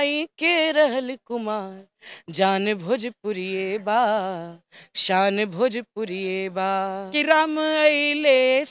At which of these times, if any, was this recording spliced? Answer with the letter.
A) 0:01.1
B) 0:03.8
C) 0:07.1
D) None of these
C